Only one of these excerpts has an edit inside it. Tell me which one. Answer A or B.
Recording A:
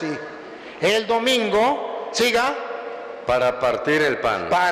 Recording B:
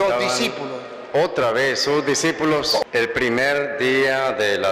B